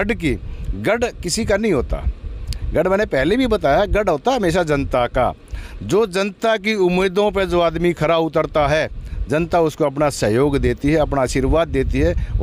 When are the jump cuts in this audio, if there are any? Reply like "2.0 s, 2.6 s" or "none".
none